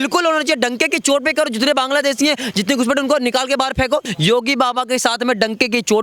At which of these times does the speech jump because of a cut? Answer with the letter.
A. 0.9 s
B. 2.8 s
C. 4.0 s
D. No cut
C